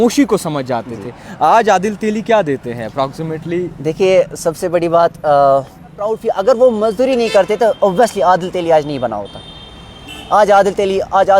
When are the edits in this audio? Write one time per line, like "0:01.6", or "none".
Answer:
0:06.1